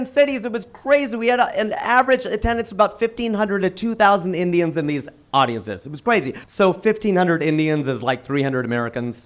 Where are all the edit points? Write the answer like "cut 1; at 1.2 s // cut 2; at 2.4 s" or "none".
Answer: cut 1; at 6.4 s